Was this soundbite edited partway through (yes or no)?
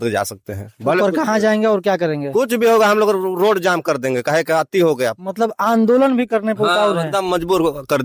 no